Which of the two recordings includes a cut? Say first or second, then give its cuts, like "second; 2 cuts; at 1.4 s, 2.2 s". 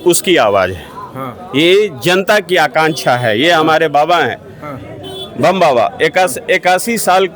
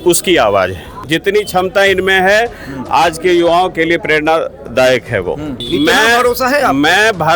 second; 2 cuts; at 1.0 s, 5.6 s